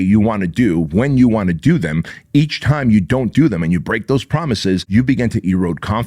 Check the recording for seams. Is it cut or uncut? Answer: cut